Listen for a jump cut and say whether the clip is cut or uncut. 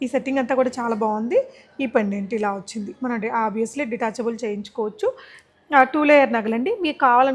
uncut